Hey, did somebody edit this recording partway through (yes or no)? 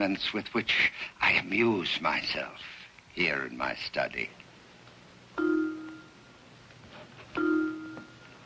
no